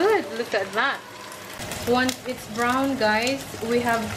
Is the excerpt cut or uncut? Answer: cut